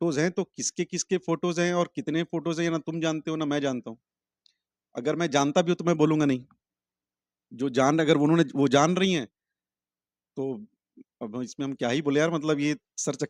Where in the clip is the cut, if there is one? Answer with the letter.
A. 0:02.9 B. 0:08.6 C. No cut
C